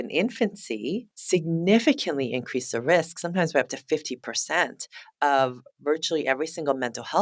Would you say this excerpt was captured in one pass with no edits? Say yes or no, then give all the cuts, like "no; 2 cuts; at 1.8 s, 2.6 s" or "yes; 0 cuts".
no; 1 cut; at 1.1 s